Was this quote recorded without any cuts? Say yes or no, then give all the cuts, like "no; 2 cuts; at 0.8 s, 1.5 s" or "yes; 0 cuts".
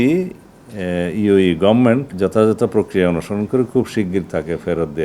no; 1 cut; at 2.1 s